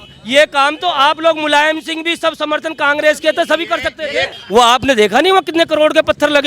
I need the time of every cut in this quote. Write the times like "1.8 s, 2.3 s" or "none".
4.3 s